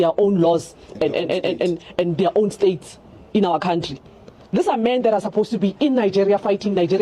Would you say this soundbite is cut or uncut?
uncut